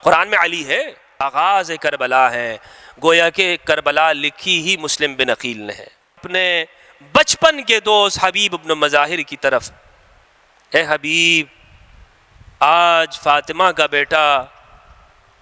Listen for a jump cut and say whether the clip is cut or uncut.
cut